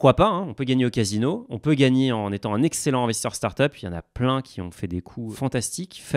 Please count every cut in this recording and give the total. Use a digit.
1